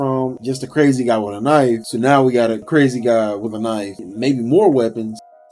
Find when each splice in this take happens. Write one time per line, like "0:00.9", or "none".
0:01.9